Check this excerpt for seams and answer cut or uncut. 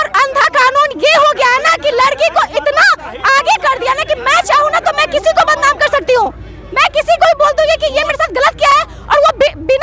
uncut